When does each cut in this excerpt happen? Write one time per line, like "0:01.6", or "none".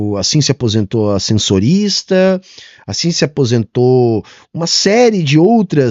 none